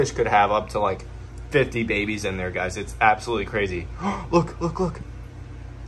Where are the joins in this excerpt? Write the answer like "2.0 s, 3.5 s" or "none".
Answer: none